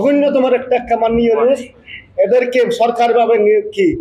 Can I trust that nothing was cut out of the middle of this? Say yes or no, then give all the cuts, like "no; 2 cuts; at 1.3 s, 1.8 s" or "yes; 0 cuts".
yes; 0 cuts